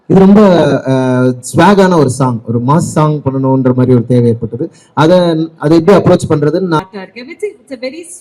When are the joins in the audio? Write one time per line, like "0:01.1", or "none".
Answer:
0:06.8